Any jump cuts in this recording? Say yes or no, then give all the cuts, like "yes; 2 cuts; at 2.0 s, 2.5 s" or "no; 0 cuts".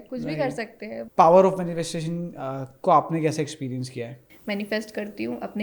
yes; 2 cuts; at 1.0 s, 4.3 s